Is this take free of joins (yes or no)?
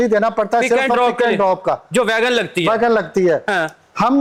yes